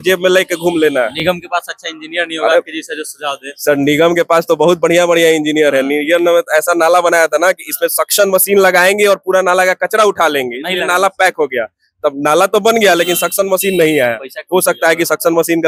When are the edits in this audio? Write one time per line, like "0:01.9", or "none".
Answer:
none

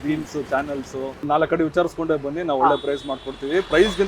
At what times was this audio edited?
0:01.2

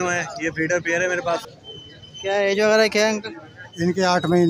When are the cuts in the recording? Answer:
0:01.5

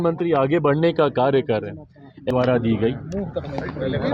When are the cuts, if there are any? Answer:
0:02.3

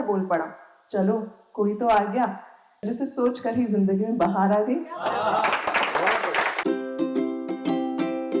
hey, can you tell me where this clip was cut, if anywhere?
0:06.6

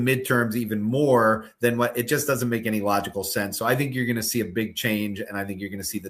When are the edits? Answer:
none

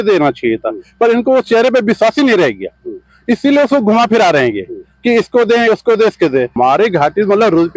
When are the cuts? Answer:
0:06.5

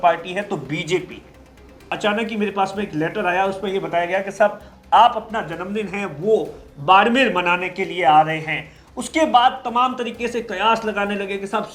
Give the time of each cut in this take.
0:02.0

